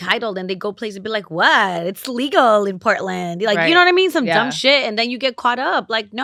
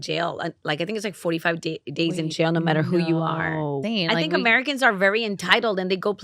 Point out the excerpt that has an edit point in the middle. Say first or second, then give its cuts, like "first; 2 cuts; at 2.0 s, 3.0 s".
second; 1 cut; at 3.8 s